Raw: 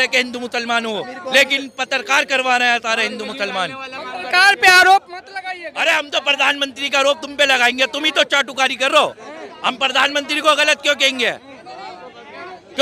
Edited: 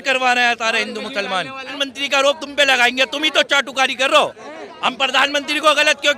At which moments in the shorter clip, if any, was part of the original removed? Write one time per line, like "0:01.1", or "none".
0:01.8